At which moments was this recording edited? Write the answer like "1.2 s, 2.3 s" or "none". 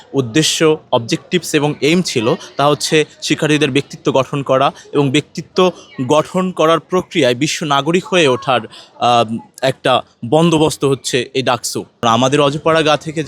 12.0 s